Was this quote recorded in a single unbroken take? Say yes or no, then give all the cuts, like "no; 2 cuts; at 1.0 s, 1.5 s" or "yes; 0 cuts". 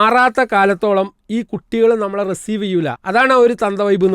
no; 1 cut; at 3.0 s